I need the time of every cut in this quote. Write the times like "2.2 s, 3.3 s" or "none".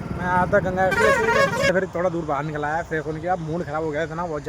1.7 s